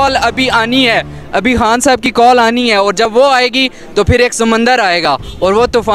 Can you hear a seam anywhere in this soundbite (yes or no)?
no